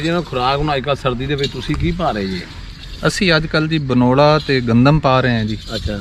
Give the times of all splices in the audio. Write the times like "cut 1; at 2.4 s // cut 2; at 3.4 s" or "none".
none